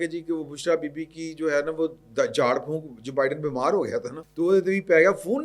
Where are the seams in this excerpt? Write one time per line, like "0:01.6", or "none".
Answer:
0:04.2